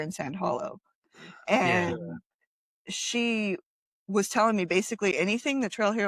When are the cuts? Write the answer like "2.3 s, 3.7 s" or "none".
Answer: none